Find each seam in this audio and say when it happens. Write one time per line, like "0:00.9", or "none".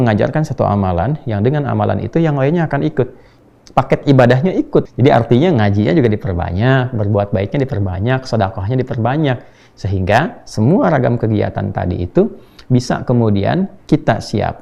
0:03.3
0:04.9